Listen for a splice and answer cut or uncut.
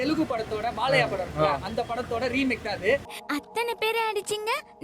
cut